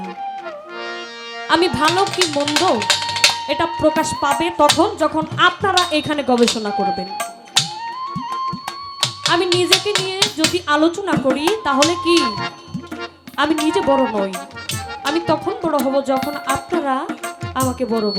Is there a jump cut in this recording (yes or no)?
no